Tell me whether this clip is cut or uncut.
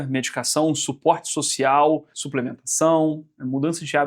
cut